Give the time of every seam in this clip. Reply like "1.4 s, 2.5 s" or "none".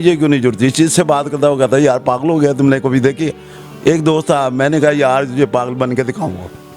none